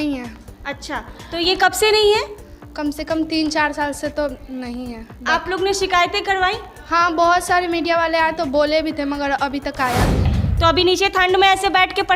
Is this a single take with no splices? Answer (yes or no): no